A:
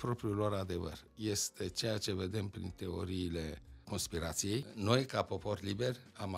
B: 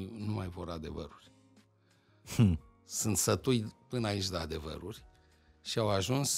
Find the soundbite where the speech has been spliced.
A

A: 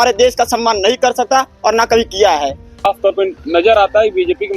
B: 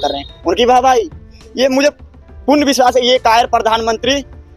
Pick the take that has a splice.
A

